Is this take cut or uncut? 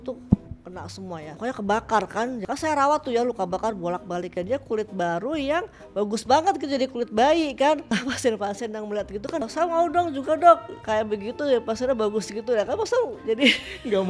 cut